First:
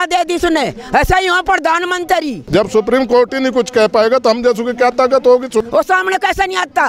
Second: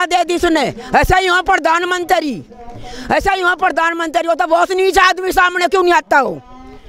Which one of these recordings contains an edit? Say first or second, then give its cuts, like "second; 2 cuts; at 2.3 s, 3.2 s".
first; 2 cuts; at 2.4 s, 5.7 s